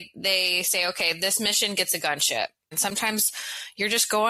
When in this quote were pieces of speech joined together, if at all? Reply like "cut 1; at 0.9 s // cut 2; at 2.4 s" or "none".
cut 1; at 2.7 s